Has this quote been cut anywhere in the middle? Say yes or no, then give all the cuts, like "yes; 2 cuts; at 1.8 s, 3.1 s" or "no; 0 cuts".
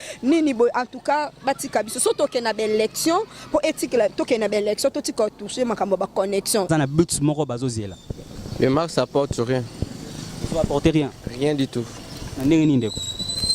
yes; 1 cut; at 6.7 s